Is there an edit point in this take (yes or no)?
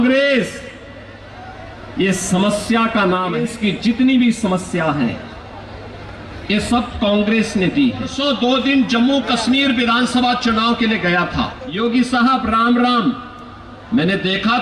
yes